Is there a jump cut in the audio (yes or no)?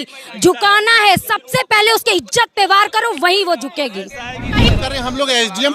yes